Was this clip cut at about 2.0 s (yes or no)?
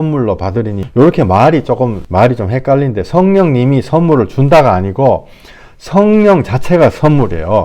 yes